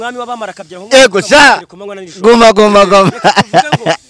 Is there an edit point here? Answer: no; 0 cuts

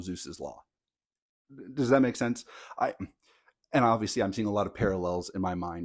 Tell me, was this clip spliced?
no; 0 cuts

